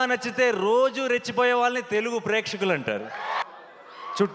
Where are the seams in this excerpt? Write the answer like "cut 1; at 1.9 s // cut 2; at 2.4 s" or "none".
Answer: cut 1; at 3.4 s